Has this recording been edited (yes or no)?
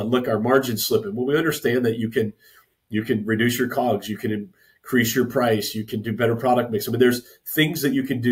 no